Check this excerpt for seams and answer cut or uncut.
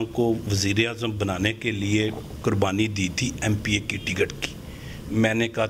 uncut